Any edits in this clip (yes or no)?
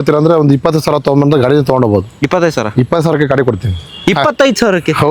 no